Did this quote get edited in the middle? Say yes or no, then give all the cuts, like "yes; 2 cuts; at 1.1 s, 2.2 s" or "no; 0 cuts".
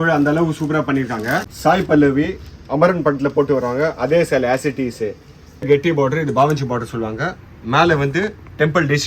yes; 2 cuts; at 1.5 s, 5.6 s